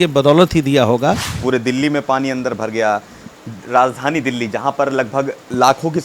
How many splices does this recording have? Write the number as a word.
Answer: one